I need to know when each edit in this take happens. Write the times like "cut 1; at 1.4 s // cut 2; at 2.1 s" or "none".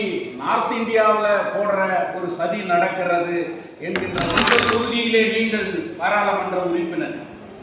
cut 1; at 4.2 s